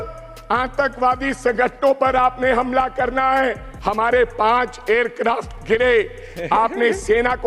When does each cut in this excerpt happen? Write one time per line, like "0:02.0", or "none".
0:03.7